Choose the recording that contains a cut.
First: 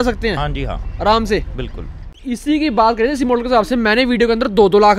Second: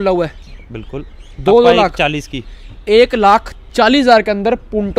first; 1 cut; at 2.2 s

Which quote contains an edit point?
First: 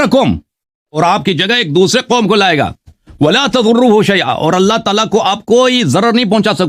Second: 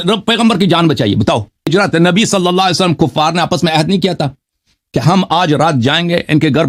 second; 1 cut; at 1.7 s

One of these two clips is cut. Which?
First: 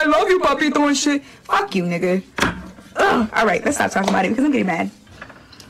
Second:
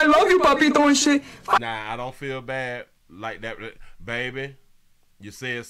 first; 1 cut; at 1.6 s

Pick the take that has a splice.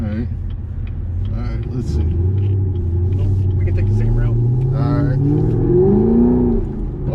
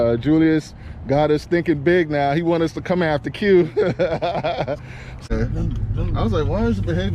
second; 1 cut; at 5.3 s

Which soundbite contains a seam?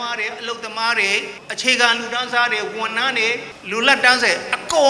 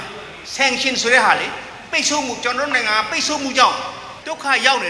first; 2 cuts; at 1.4 s, 3.5 s

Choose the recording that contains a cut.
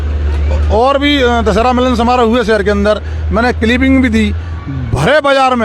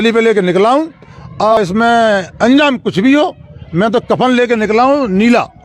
second; 1 cut; at 1.5 s

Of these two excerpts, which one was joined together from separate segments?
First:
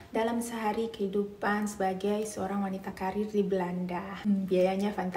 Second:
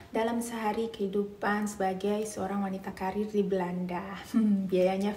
first; 1 cut; at 4.3 s

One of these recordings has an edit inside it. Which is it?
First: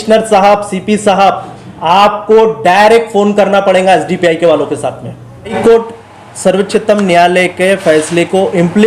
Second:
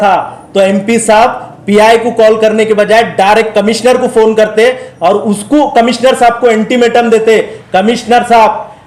first; 1 cut; at 5.6 s

